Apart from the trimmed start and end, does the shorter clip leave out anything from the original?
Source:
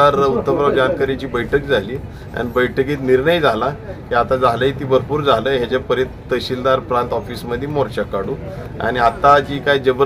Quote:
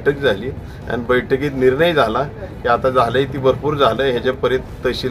no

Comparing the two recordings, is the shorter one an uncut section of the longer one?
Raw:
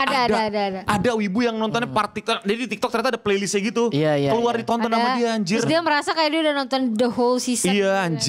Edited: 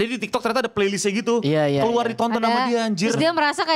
yes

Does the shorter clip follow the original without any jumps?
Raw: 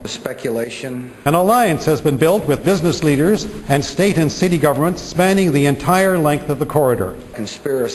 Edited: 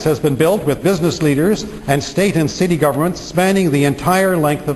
yes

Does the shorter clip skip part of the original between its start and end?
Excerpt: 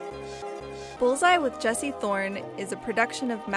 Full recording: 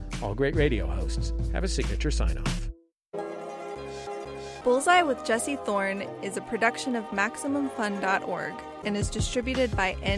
no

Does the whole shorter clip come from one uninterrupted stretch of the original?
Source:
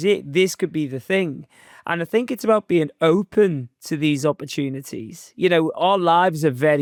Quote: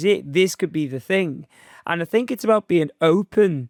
yes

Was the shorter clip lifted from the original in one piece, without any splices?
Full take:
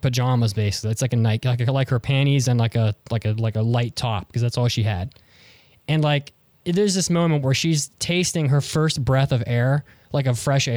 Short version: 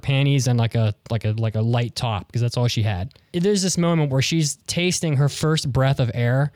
no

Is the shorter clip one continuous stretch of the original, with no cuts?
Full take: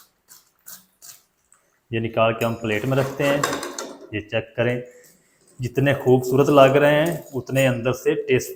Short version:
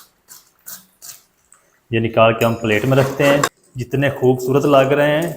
no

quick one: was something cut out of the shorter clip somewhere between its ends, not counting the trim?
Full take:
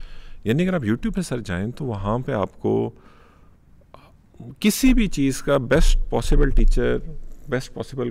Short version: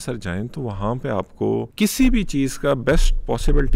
yes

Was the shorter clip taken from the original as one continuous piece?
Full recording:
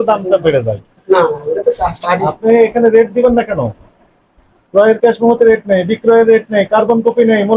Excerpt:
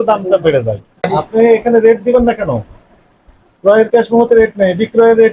no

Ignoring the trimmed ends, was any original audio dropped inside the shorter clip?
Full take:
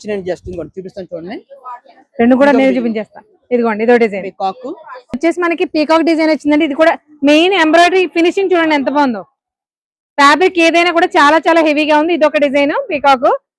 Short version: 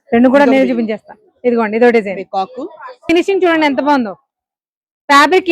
yes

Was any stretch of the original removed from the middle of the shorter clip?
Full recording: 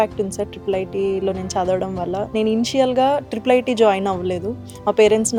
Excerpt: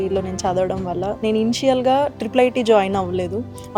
no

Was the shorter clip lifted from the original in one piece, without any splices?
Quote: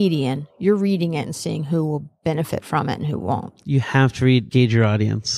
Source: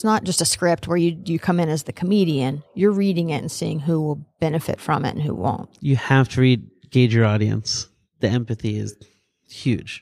no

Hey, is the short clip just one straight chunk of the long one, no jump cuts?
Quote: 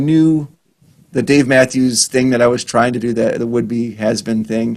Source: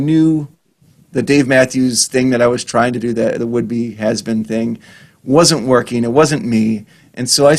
yes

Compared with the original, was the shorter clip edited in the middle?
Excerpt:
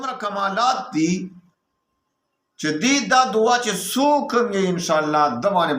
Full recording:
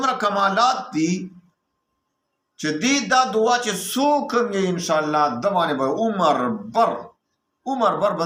no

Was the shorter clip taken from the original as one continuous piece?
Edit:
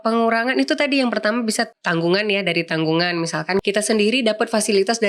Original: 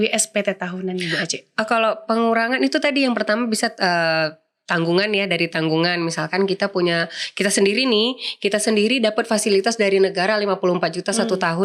no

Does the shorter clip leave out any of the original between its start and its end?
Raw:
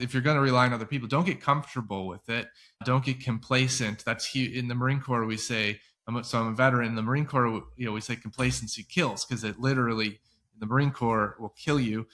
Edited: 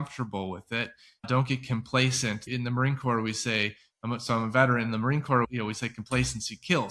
yes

